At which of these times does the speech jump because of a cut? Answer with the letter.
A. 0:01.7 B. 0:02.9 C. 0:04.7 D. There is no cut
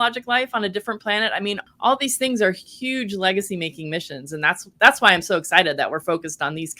A